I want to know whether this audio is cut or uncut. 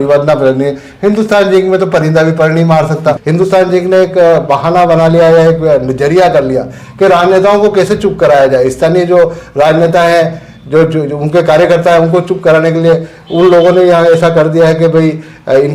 cut